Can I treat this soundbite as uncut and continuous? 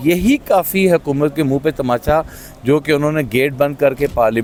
yes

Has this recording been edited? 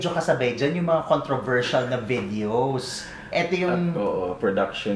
no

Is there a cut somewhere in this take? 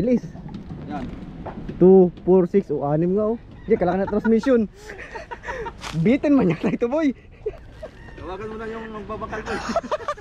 no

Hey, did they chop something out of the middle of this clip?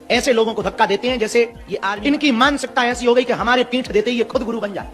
yes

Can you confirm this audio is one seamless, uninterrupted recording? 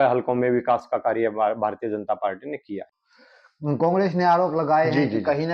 yes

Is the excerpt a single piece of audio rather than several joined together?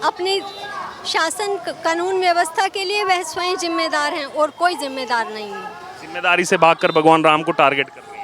yes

